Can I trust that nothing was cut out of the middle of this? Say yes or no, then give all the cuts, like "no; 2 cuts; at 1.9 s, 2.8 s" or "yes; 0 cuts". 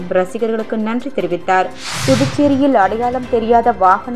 no; 1 cut; at 1.9 s